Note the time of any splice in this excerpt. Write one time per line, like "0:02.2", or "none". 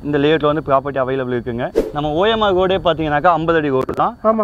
0:01.7